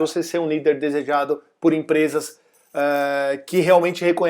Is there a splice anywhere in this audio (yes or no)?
no